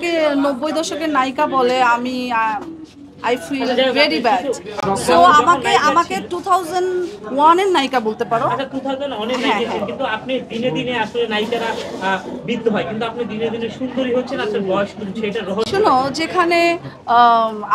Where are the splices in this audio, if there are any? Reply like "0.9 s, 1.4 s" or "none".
none